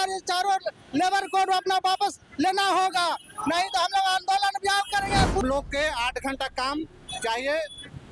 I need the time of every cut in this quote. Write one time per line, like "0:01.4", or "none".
0:05.4